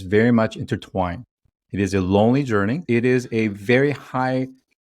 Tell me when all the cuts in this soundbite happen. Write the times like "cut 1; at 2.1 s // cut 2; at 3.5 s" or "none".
cut 1; at 2.8 s